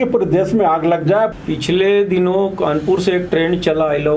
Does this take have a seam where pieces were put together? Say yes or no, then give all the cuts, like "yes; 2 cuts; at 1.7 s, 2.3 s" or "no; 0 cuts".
yes; 1 cut; at 1.3 s